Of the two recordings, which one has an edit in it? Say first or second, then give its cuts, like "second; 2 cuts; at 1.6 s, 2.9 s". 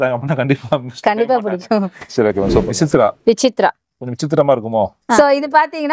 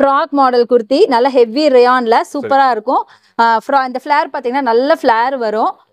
first; 2 cuts; at 2.7 s, 5.2 s